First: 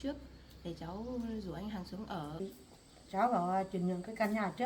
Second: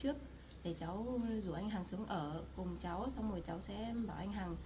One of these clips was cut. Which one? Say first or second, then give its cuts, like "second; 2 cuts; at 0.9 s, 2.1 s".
first; 1 cut; at 2.3 s